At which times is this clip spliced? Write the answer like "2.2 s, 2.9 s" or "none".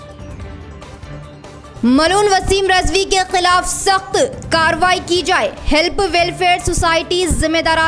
1.1 s

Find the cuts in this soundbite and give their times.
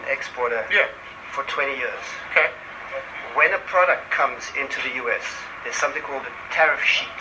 none

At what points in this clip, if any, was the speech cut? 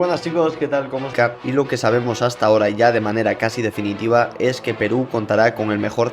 1.1 s

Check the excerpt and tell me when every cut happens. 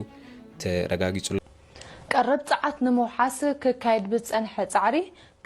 1.4 s

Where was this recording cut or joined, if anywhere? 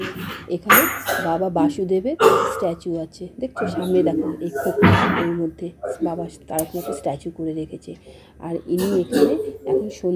none

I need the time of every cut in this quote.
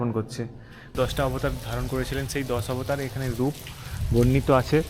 0.9 s

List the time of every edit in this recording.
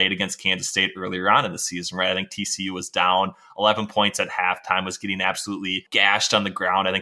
5.9 s

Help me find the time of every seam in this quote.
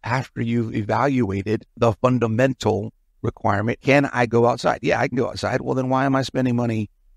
1.7 s, 3.8 s

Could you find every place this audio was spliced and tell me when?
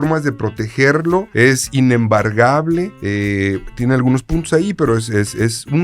1.3 s, 3.0 s

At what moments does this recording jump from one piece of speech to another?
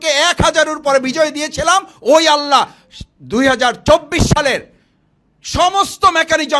none

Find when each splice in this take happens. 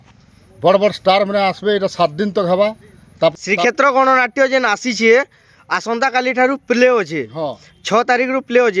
3.3 s

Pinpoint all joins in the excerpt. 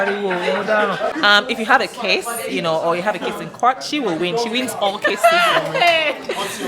1.1 s

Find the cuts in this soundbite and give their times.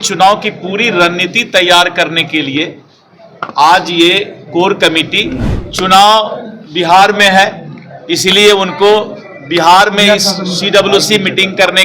5.5 s

